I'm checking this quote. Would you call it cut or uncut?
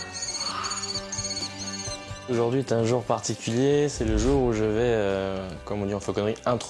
cut